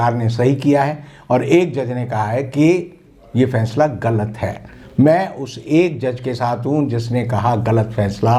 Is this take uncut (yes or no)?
yes